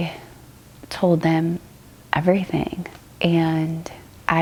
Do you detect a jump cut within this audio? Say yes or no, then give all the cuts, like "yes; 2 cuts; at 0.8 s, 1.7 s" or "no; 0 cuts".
no; 0 cuts